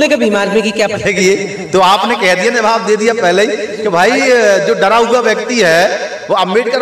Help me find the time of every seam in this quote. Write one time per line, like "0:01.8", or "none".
none